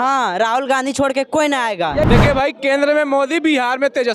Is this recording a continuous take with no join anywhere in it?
no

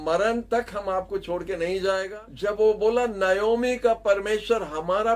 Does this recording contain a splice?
yes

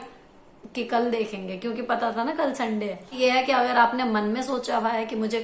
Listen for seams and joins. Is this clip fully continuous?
no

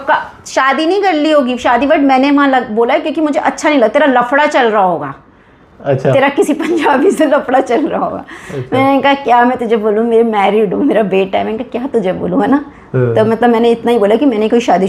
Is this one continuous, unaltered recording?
yes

